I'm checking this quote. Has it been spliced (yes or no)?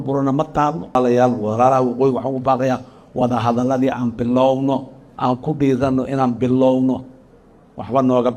yes